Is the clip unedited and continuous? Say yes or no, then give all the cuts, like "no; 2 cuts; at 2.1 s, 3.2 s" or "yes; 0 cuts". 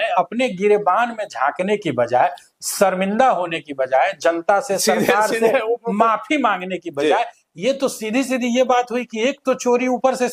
yes; 0 cuts